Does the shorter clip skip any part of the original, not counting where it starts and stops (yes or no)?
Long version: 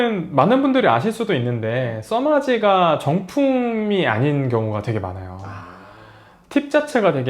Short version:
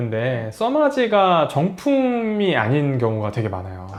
no